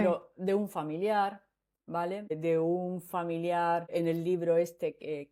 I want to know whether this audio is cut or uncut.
uncut